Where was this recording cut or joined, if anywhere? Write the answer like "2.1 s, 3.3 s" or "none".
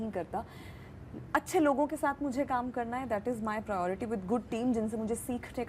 none